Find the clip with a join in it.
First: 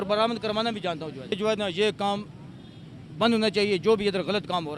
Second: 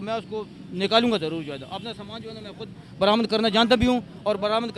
first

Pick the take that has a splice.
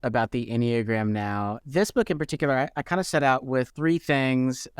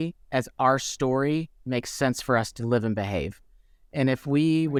first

